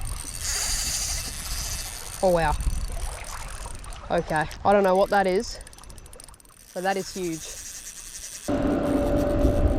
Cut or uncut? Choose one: cut